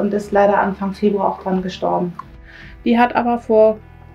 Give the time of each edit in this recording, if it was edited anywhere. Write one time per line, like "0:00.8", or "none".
0:02.3